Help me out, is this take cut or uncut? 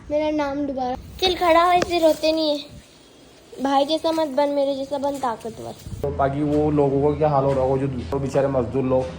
cut